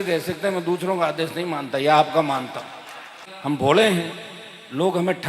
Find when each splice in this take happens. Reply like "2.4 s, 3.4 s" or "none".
3.2 s

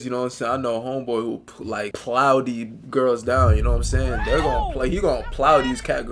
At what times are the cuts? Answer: 1.9 s

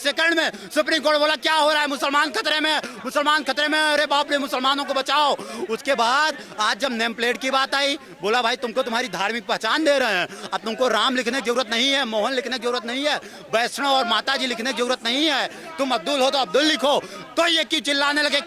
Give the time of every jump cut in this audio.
none

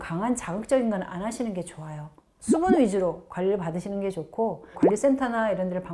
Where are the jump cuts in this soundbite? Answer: 4.7 s

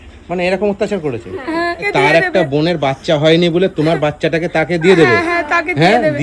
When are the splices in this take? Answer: 1.9 s

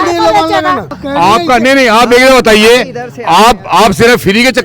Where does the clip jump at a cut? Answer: 0.9 s

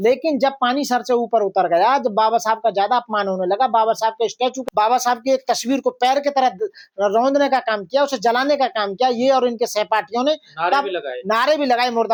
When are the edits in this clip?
none

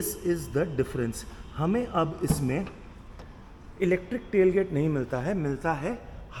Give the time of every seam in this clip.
none

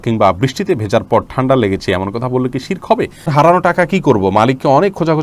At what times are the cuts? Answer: 3.3 s

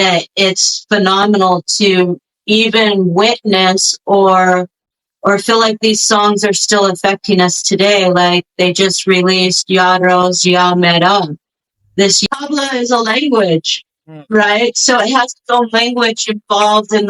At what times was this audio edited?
12.1 s

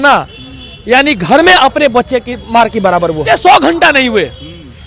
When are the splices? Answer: 3.3 s

